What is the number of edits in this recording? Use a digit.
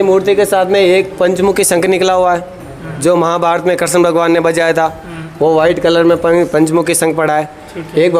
0